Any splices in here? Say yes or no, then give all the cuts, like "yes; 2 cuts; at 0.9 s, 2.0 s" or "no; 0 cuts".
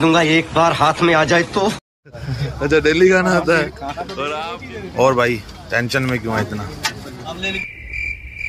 no; 0 cuts